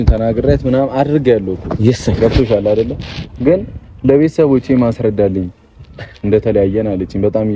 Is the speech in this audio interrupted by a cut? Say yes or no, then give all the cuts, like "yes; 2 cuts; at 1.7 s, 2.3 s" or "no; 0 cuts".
no; 0 cuts